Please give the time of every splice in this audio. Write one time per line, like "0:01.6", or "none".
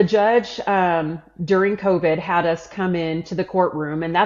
none